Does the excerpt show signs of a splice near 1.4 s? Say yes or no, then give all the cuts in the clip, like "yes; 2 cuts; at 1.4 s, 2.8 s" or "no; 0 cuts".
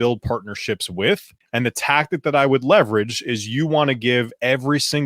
yes; 1 cut; at 1.4 s